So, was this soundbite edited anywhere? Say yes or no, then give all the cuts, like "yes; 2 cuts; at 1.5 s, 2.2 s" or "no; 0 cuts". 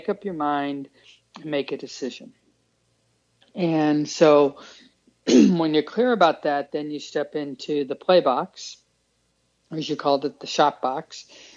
no; 0 cuts